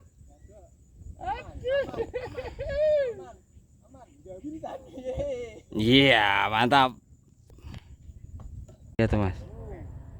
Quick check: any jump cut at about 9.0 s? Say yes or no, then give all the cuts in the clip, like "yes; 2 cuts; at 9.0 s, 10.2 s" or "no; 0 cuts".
yes; 1 cut; at 9.0 s